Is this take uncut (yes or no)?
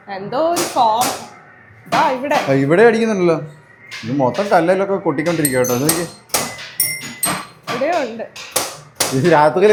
yes